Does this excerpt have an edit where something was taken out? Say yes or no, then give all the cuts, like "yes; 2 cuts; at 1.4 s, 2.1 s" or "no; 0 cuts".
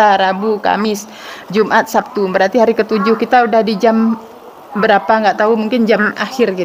no; 0 cuts